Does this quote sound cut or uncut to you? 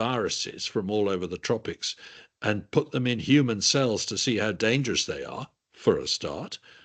uncut